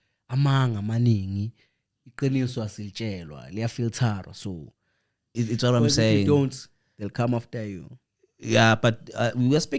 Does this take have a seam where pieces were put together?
yes; 1 cut; at 5.4 s

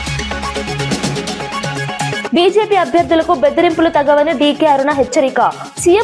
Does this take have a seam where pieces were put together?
yes; 1 cut; at 2.2 s

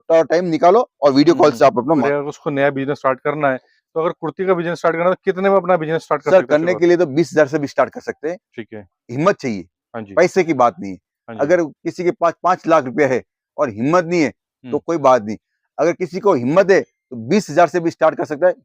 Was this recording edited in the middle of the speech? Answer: yes; 1 cut; at 2.0 s

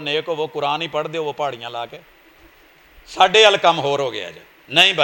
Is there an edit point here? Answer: no; 0 cuts

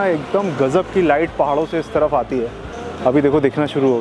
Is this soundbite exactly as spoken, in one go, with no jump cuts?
yes; 0 cuts

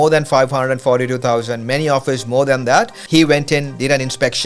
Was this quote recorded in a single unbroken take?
no; 1 cut; at 3.0 s

